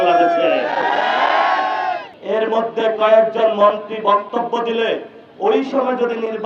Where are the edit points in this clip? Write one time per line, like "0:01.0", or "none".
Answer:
0:02.1